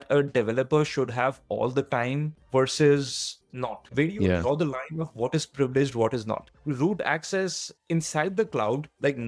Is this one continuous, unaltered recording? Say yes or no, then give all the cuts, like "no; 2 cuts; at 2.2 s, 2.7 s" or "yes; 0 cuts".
yes; 0 cuts